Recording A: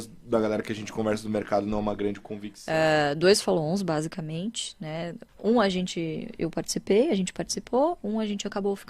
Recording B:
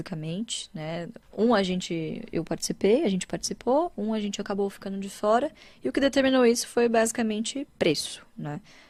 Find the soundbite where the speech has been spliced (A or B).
A